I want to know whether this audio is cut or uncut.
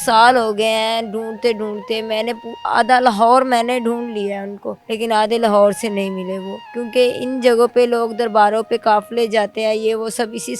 uncut